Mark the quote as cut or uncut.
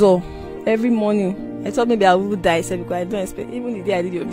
cut